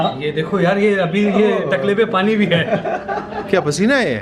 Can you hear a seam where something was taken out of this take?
no; 0 cuts

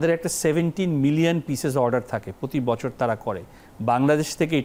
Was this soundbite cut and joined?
no; 0 cuts

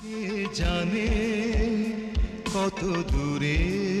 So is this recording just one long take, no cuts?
no; 1 cut; at 1.0 s

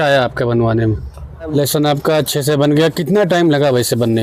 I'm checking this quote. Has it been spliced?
yes; 1 cut; at 1.5 s

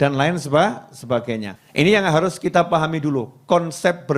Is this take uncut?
no; 1 cut; at 1.6 s

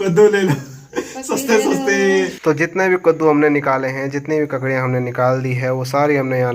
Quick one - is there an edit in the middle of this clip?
yes; 1 cut; at 2.4 s

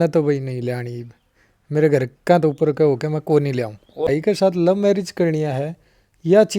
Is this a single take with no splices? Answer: no; 1 cut; at 4.1 s

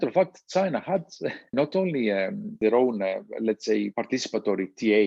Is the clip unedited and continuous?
no; 3 cuts; at 1.5 s, 2.5 s, 3.9 s

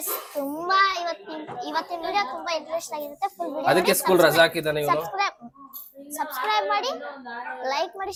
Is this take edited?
no; 0 cuts

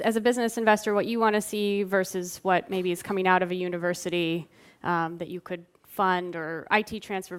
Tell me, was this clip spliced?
yes; 1 cut; at 2.9 s

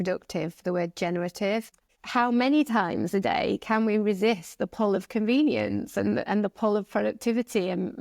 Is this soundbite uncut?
no; 1 cut; at 1.7 s

